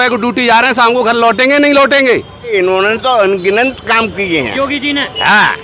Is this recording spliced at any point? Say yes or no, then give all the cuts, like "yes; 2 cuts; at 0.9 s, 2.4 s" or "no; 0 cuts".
yes; 1 cut; at 2.5 s